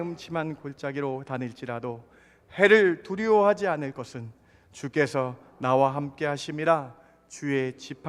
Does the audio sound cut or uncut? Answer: uncut